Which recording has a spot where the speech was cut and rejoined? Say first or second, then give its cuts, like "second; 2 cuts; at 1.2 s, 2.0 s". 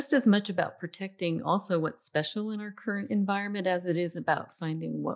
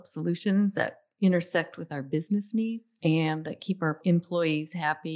second; 2 cuts; at 2.9 s, 4.0 s